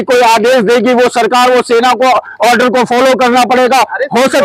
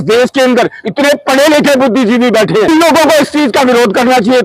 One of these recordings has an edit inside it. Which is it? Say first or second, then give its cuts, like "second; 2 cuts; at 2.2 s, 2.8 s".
second; 1 cut; at 2.7 s